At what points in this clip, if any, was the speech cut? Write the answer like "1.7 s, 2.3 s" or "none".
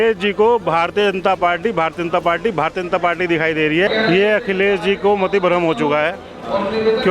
3.9 s